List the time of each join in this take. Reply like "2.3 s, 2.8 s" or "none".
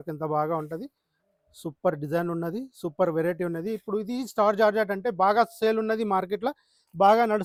none